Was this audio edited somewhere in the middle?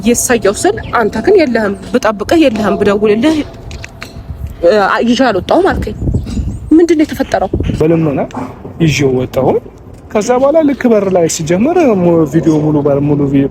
yes; 1 cut; at 7.8 s

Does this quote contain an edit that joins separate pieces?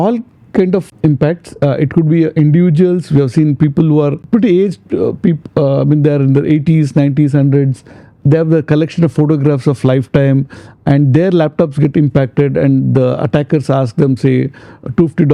yes; 2 cuts; at 0.9 s, 4.2 s

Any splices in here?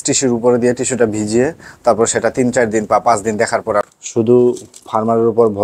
yes; 1 cut; at 3.9 s

